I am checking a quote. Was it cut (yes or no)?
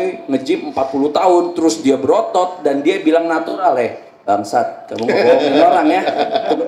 no